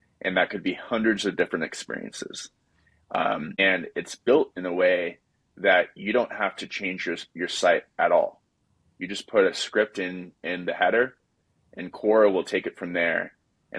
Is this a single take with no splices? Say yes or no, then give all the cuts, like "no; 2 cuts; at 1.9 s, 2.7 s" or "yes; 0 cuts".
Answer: no; 1 cut; at 3.6 s